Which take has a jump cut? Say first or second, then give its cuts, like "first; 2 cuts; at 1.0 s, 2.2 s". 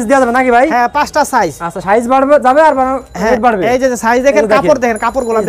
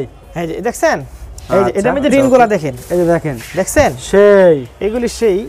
second; 1 cut; at 2.1 s